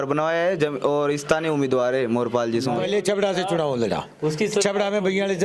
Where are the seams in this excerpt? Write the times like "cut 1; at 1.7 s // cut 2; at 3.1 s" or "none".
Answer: cut 1; at 2.8 s